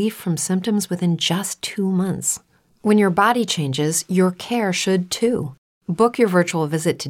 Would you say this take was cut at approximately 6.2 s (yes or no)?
no